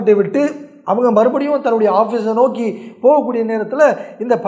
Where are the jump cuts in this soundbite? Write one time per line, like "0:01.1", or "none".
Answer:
none